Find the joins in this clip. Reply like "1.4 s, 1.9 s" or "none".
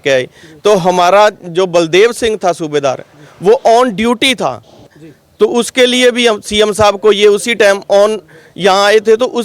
4.8 s